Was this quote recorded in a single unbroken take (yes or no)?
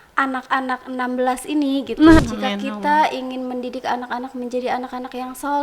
no